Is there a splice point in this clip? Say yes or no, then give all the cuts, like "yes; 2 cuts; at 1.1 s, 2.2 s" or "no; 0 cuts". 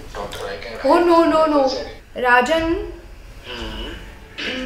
yes; 1 cut; at 1.9 s